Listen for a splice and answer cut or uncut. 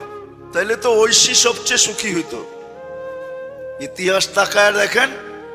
uncut